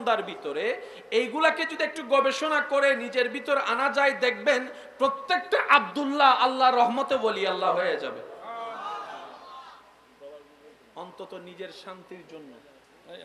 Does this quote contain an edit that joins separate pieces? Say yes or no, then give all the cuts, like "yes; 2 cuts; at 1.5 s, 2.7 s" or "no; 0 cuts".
no; 0 cuts